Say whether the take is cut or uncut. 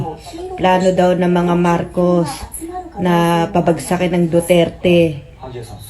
uncut